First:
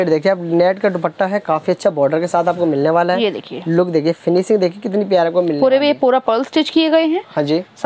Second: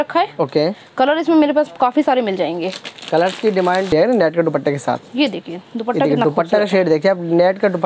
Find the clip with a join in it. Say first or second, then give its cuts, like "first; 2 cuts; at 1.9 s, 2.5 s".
second; 1 cut; at 3.9 s